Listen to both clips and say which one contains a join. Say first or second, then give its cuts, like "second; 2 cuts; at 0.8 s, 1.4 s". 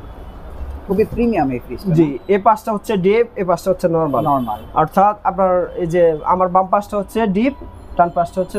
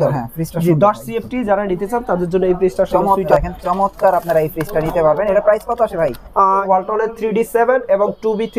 second; 2 cuts; at 3.3 s, 6.6 s